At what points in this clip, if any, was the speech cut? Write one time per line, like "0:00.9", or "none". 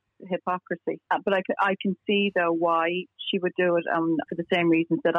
0:04.3